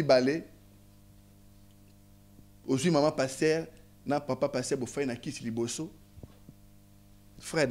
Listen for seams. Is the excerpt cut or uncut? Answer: uncut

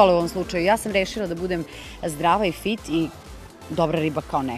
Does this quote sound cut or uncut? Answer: uncut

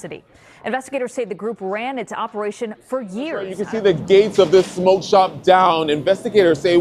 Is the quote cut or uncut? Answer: cut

